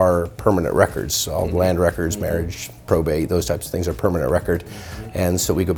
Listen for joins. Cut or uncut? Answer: uncut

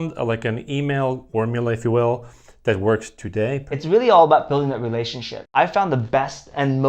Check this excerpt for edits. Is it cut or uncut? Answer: cut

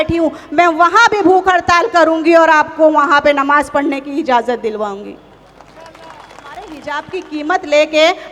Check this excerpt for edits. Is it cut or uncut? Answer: cut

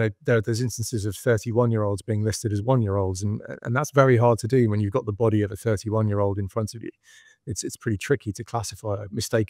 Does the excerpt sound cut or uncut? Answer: uncut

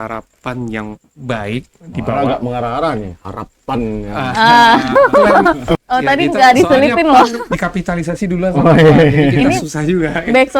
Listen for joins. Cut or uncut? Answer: cut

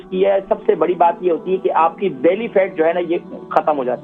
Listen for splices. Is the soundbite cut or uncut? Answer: uncut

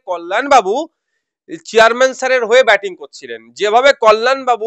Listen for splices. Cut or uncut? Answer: uncut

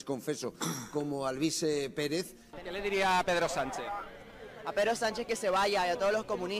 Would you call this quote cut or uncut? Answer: cut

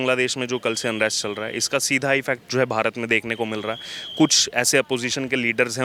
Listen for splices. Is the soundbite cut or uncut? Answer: uncut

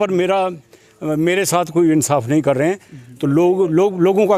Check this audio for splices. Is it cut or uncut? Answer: uncut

